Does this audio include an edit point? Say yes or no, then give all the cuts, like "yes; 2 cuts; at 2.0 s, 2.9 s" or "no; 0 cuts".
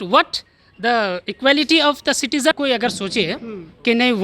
yes; 1 cut; at 2.5 s